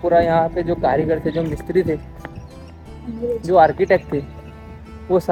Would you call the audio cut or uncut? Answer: uncut